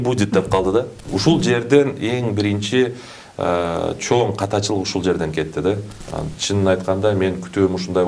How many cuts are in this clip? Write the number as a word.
two